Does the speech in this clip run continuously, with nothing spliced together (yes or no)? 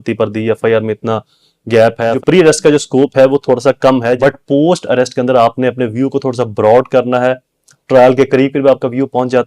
no